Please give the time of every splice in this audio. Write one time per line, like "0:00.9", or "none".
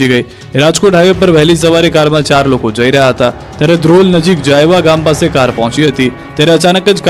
0:05.1